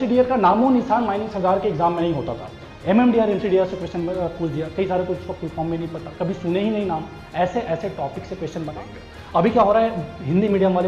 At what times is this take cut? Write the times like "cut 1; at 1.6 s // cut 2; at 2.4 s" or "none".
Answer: cut 1; at 8.7 s